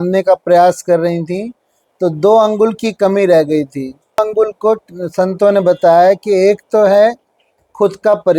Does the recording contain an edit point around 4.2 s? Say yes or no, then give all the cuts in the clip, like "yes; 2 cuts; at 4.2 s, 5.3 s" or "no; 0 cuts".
yes; 1 cut; at 4.2 s